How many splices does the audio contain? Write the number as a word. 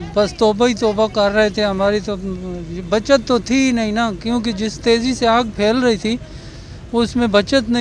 zero